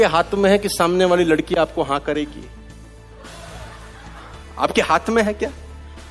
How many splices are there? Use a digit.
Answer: 0